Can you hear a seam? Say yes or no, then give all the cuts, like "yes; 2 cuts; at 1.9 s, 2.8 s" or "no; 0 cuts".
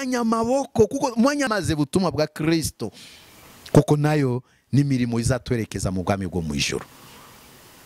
yes; 1 cut; at 1.5 s